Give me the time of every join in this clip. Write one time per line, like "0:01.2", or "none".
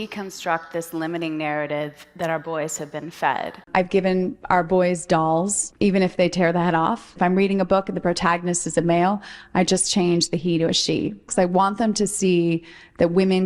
0:03.6
0:05.6
0:07.1